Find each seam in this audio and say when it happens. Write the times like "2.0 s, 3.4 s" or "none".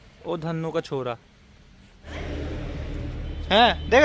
2.1 s